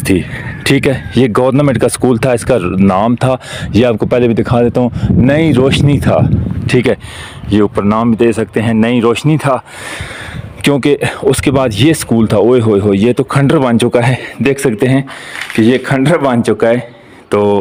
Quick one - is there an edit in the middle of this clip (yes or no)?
no